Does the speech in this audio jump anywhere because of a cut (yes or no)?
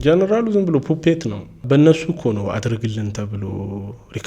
yes